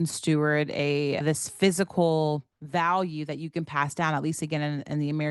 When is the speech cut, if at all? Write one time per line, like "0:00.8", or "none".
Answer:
0:01.2
0:02.5